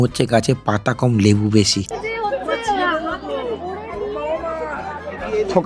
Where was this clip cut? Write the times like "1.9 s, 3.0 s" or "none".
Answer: 1.9 s